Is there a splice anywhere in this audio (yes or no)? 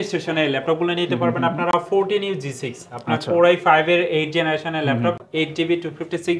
no